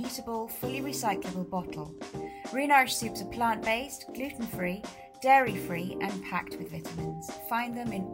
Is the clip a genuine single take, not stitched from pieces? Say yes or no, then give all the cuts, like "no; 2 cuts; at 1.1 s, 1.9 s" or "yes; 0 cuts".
yes; 0 cuts